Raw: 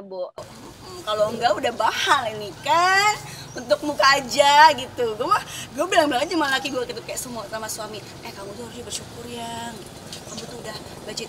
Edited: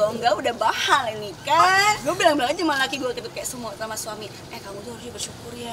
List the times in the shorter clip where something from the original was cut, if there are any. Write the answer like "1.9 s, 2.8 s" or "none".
1.6 s